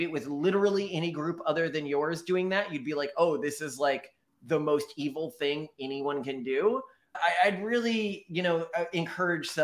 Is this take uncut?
yes; 0 cuts

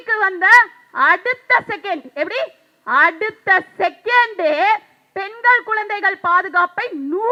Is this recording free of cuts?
yes; 0 cuts

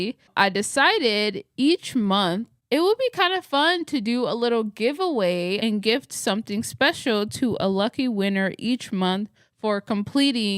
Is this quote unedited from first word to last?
no; 1 cut; at 2.5 s

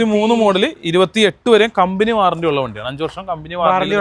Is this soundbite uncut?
yes; 0 cuts

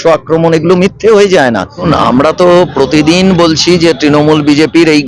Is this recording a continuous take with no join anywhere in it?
no; 1 cut; at 1.9 s

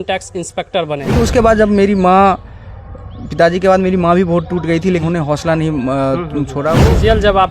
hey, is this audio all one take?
no; 3 cuts; at 1.2 s, 5.0 s, 6.8 s

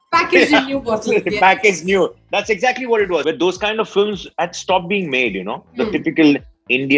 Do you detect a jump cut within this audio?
yes; 1 cut; at 3.2 s

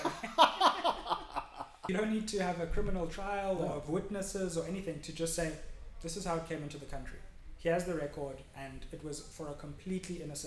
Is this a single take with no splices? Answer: no; 1 cut; at 1.8 s

